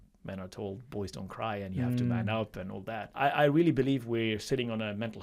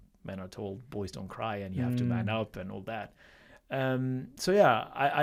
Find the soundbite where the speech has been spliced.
first; 1 cut; at 3.1 s

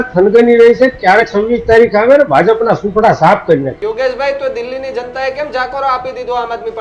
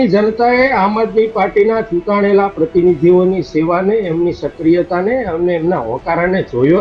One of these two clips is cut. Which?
first; 1 cut; at 3.8 s

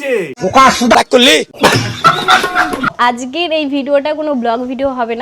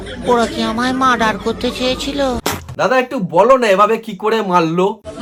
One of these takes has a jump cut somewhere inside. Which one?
first; 2 cuts; at 0.9 s, 2.9 s

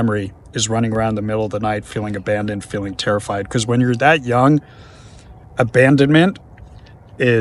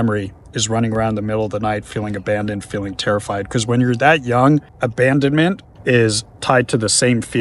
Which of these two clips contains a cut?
second; 2 cuts; at 4.7 s, 5.7 s

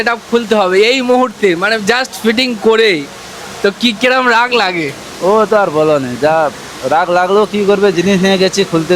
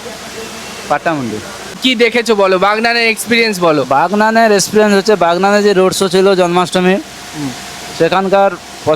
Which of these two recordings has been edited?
second; 1 cut; at 1.7 s

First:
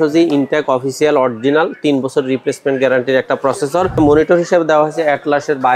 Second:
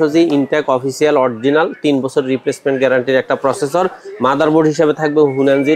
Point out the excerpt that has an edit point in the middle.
first; 1 cut; at 4.0 s

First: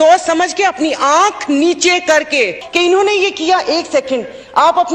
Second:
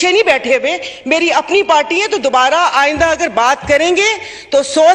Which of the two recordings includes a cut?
first; 1 cut; at 2.6 s

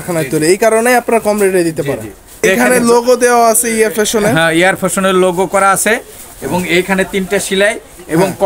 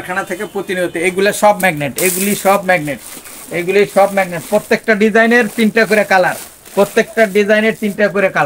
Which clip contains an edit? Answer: first; 1 cut; at 2.4 s

